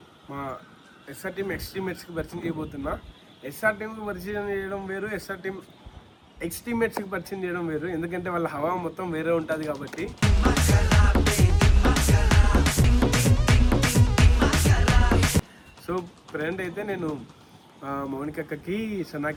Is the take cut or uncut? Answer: uncut